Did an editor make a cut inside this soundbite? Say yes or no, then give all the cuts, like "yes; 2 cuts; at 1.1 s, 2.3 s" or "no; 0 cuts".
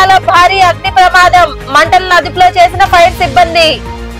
no; 0 cuts